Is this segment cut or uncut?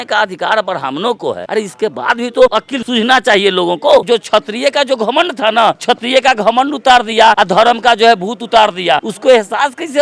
cut